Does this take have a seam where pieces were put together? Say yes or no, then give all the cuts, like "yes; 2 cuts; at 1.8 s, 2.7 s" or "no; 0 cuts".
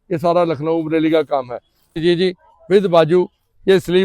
yes; 1 cut; at 2.0 s